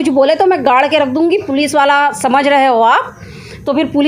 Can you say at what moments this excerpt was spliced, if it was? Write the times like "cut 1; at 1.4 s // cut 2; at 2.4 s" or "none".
none